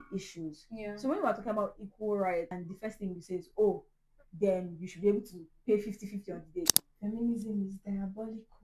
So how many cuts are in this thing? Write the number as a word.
two